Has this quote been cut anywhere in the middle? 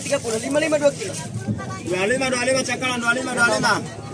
yes; 1 cut; at 1.7 s

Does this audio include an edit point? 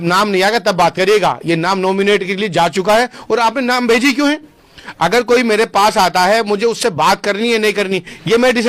no; 0 cuts

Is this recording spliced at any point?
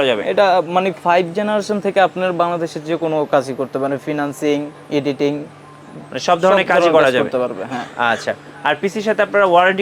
no; 0 cuts

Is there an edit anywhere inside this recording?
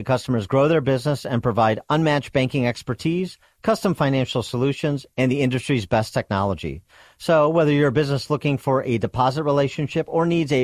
no; 0 cuts

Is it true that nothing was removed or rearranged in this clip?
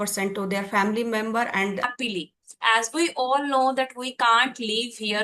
no; 1 cut; at 1.8 s

